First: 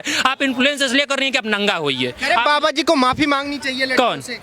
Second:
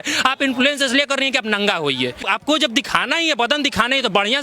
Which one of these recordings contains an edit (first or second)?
second